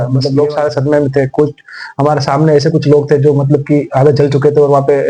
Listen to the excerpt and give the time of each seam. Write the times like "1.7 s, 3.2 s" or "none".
none